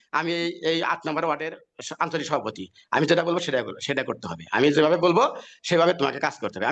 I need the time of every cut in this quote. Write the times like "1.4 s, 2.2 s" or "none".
none